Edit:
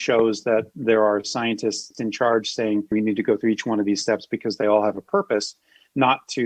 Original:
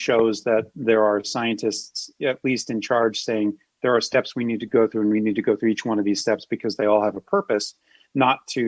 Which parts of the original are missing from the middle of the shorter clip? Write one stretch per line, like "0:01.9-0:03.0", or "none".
0:01.9-0:02.6
0:03.6-0:05.1